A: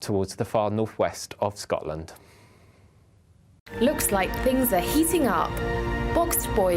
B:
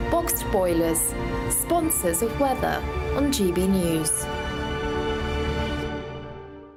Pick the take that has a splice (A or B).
A